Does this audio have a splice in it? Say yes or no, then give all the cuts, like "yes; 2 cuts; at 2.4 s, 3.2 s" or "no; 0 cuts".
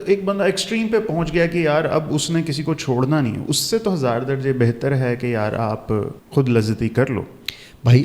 yes; 1 cut; at 6.2 s